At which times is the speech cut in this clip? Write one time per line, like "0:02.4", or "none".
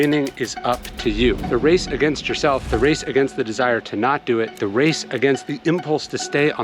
0:02.7
0:04.5

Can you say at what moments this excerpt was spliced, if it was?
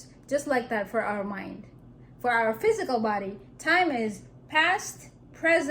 none

